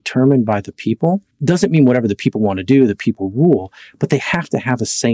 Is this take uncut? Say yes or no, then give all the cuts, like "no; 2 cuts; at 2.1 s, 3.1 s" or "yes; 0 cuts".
no; 1 cut; at 1.3 s